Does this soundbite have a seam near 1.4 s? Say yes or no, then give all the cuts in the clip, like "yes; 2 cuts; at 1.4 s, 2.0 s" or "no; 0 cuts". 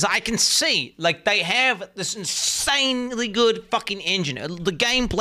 no; 0 cuts